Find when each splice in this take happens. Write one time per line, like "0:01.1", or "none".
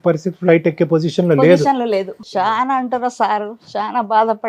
0:02.2